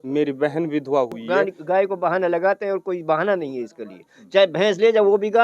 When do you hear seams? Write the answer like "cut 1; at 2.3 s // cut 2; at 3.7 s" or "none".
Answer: cut 1; at 1.2 s